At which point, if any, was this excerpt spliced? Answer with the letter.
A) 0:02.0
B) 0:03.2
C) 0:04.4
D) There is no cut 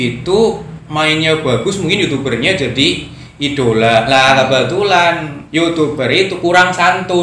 D